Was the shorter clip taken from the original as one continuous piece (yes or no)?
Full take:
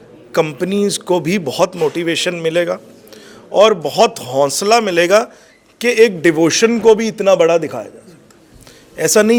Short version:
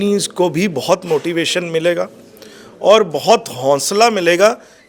yes